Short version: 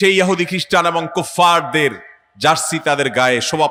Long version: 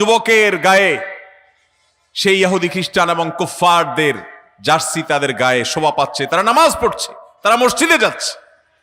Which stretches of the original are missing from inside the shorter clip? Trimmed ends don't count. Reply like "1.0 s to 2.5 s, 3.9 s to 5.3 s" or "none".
none